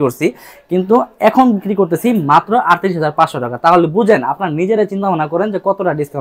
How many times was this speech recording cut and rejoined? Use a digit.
0